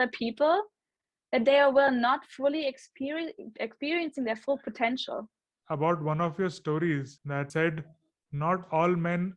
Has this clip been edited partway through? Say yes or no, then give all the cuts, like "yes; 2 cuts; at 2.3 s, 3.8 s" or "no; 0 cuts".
yes; 2 cuts; at 5.5 s, 7.4 s